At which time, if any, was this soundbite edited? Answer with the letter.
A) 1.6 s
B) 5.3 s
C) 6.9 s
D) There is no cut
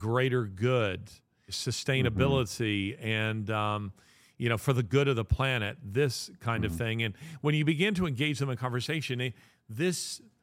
A